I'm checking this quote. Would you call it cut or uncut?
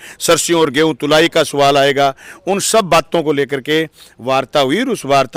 uncut